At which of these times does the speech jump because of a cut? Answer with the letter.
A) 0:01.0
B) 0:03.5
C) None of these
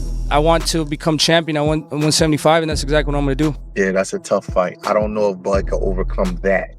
B